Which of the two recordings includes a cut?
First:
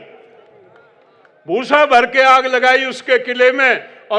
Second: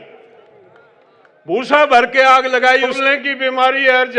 second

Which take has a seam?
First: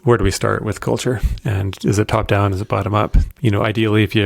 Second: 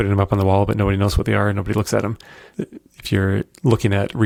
first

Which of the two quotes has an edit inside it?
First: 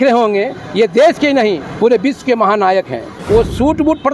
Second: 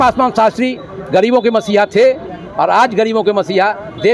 first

